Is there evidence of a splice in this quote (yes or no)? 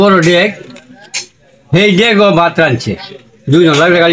no